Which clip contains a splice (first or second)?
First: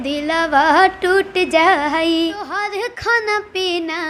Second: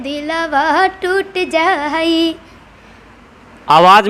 first